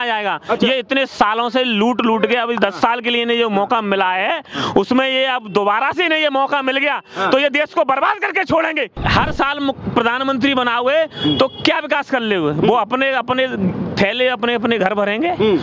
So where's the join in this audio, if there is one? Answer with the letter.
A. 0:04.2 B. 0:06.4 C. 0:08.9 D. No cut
C